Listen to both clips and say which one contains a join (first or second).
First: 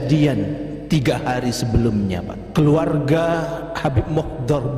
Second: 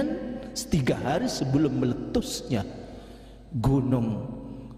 first